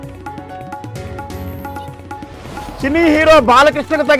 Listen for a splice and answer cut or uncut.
cut